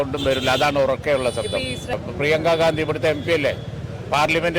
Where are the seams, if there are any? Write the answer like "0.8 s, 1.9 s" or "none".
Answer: 1.9 s